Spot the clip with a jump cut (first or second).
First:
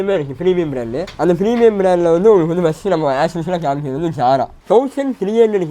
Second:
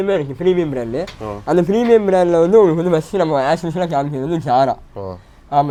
first